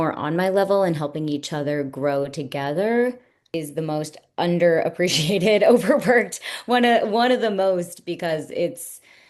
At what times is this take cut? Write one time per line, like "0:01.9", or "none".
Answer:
0:03.6